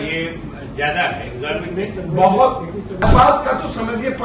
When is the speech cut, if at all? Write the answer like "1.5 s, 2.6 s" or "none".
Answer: 3.0 s